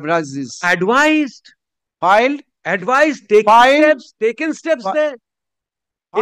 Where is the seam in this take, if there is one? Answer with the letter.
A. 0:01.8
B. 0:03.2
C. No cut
C